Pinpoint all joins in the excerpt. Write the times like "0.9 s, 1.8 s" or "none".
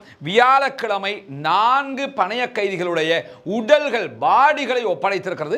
none